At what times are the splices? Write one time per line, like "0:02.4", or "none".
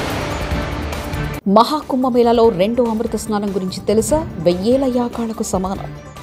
0:01.4